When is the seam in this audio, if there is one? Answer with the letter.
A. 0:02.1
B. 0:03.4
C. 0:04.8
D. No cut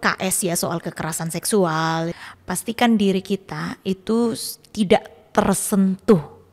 A